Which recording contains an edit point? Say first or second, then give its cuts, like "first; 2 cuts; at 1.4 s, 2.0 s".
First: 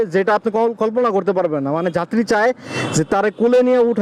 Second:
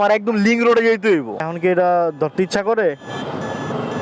second; 1 cut; at 1.5 s